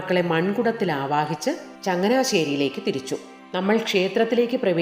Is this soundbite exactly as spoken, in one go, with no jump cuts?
no; 2 cuts; at 1.7 s, 3.4 s

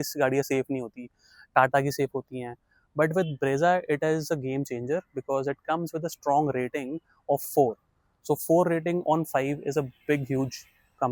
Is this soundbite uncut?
yes; 0 cuts

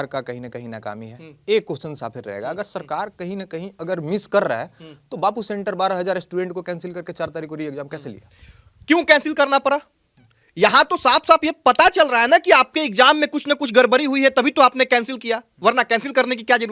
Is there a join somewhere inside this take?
no; 0 cuts

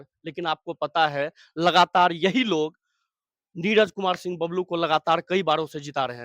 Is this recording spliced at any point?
no; 0 cuts

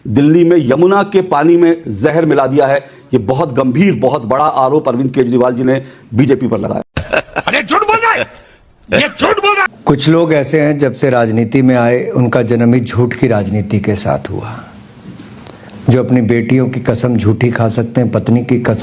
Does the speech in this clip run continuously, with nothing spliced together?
no; 2 cuts; at 6.9 s, 9.7 s

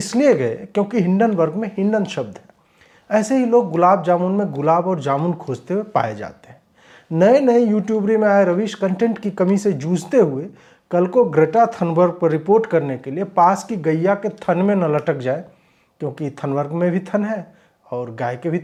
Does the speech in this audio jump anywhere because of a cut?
no; 0 cuts

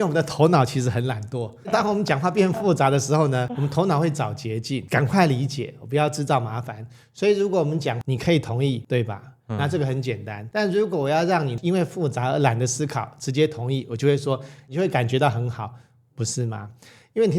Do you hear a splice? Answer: yes; 7 cuts; at 1.7 s, 3.5 s, 4.8 s, 8.0 s, 8.8 s, 10.3 s, 11.5 s

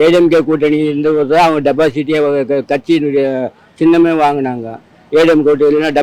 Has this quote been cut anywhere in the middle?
no; 0 cuts

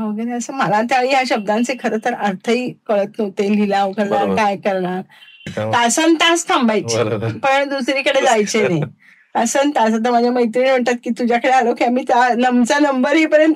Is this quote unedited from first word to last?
no; 1 cut; at 5.5 s

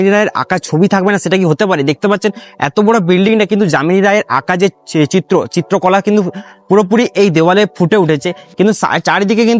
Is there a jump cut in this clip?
no; 0 cuts

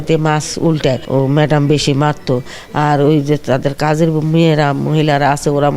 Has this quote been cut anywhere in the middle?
yes; 1 cut; at 1.0 s

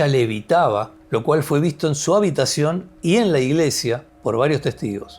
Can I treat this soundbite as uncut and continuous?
no; 2 cuts; at 1.0 s, 4.1 s

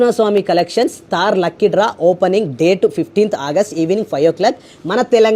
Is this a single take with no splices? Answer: yes; 0 cuts

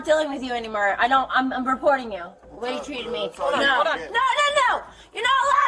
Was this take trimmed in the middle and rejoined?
no; 0 cuts

